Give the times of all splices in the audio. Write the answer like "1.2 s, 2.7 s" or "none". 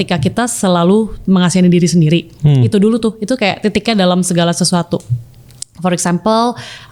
none